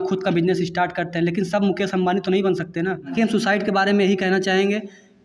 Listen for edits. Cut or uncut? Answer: cut